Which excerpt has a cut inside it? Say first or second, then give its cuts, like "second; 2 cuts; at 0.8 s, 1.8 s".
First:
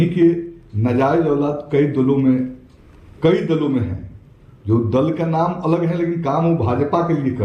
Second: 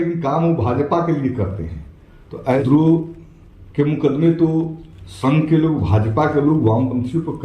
second; 1 cut; at 2.6 s